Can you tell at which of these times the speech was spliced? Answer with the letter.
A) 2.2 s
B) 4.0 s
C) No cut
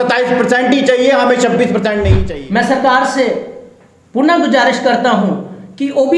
A